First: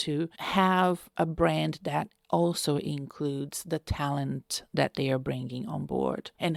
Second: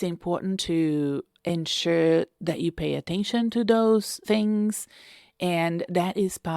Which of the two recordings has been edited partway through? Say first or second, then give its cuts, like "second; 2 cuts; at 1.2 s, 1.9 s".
second; 1 cut; at 4.1 s